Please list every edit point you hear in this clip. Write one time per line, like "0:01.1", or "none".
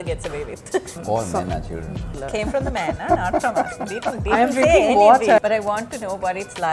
0:01.0
0:02.2
0:05.4